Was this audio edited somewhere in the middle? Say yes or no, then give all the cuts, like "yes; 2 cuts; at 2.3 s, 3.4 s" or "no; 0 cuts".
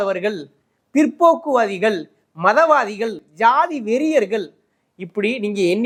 no; 0 cuts